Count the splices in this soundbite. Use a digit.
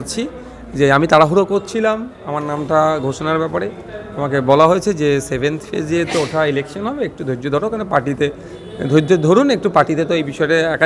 0